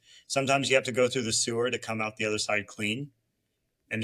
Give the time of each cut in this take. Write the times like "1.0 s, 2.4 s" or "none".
none